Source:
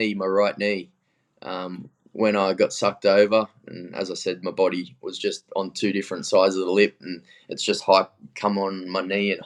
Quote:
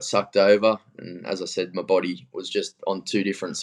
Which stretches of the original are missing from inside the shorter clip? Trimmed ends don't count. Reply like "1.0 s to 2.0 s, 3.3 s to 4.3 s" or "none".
none